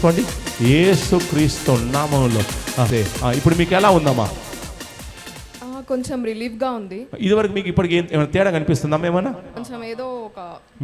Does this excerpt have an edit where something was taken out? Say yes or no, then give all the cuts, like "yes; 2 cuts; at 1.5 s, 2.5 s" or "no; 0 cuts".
yes; 2 cuts; at 2.9 s, 9.6 s